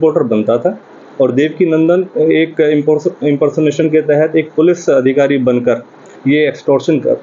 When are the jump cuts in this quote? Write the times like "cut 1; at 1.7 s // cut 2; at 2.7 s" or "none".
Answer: none

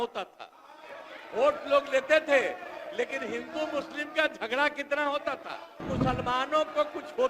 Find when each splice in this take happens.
cut 1; at 5.9 s

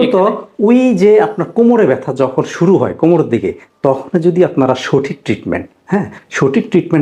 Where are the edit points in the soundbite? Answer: none

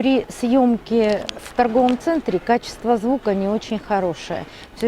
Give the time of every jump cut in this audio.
cut 1; at 1.4 s

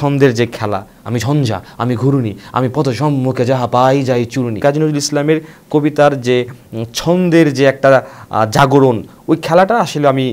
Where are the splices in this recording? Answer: cut 1; at 0.9 s // cut 2; at 4.6 s // cut 3; at 9.1 s

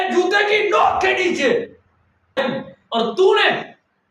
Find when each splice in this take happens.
cut 1; at 2.4 s

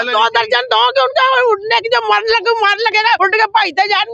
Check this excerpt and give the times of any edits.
cut 1; at 3.2 s

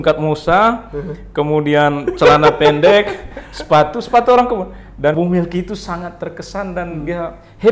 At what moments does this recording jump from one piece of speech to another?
cut 1; at 5.1 s

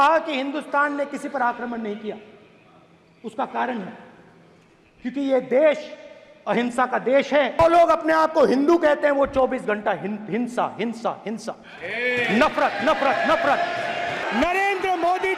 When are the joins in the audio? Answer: cut 1; at 7.6 s // cut 2; at 14.2 s

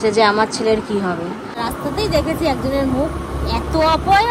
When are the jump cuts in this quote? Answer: cut 1; at 1.4 s

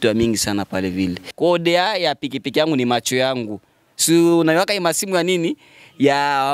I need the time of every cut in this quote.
cut 1; at 1.3 s

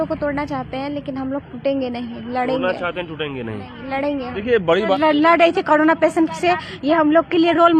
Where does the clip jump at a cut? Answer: cut 1; at 4.9 s

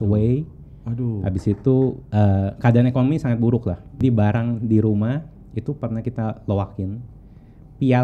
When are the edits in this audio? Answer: cut 1; at 4.0 s

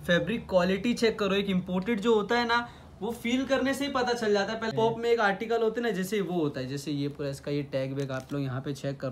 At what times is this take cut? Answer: cut 1; at 4.7 s

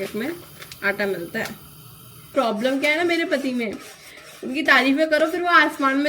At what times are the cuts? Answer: cut 1; at 2.3 s

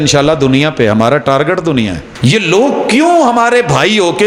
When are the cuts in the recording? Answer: cut 1; at 2.0 s

